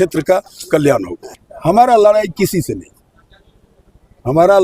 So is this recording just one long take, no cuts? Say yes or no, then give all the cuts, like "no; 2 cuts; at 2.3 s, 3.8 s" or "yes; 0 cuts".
no; 1 cut; at 1.2 s